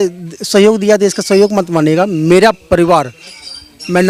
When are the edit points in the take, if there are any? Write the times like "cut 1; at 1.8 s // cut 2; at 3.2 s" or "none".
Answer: none